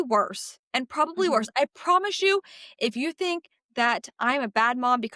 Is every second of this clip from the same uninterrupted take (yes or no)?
yes